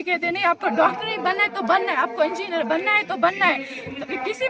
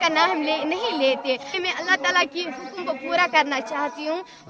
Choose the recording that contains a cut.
second; 1 cut; at 1.5 s

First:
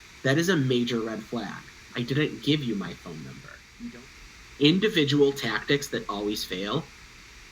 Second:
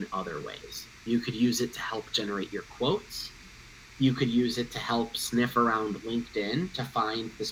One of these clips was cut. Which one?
first; 1 cut; at 4.1 s

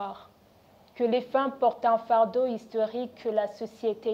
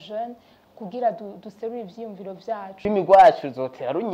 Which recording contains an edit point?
second; 1 cut; at 2.8 s

